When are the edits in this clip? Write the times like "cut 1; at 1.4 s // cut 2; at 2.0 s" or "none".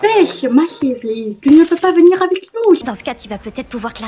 cut 1; at 2.8 s